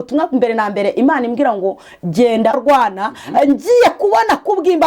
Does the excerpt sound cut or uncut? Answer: cut